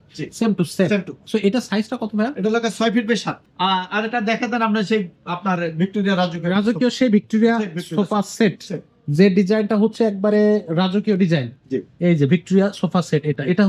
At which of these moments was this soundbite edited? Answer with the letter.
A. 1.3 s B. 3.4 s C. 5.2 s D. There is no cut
B